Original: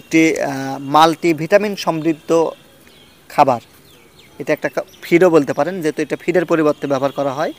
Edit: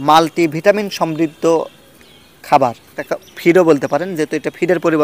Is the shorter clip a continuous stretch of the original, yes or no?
no